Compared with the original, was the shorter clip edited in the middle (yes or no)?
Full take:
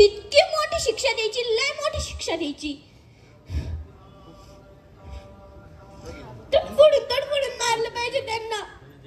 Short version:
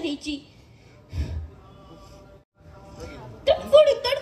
yes